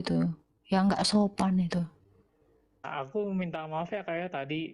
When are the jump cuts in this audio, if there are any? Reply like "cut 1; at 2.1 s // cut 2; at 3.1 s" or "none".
cut 1; at 3.1 s